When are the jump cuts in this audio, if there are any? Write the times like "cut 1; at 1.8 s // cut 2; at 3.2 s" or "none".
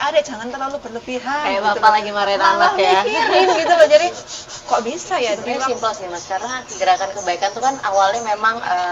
cut 1; at 5.5 s